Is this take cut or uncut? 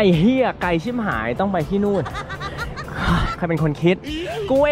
uncut